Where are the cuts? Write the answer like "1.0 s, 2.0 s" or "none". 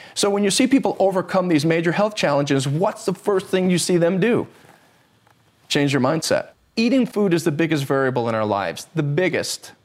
6.7 s